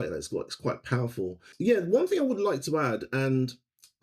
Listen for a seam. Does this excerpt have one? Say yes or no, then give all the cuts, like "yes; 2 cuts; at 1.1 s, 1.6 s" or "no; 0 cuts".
yes; 1 cut; at 1.5 s